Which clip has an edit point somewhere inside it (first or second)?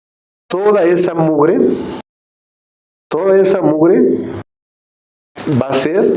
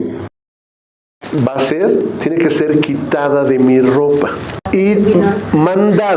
second